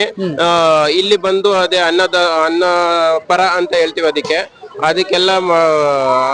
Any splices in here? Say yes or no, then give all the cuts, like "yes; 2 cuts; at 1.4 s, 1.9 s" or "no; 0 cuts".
no; 0 cuts